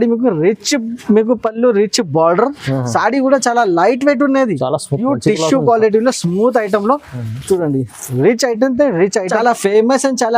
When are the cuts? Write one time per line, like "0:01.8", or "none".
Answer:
0:09.3